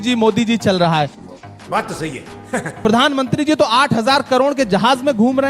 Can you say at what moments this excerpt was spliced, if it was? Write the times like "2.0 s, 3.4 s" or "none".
1.3 s, 2.7 s